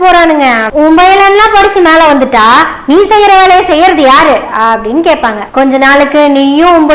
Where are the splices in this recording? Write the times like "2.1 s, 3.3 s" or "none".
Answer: none